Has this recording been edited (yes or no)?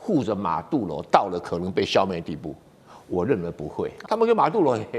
yes